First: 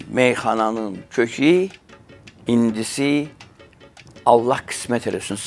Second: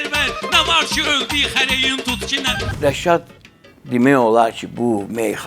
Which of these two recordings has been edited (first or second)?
second